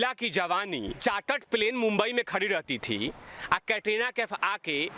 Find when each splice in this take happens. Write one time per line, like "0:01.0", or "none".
0:01.0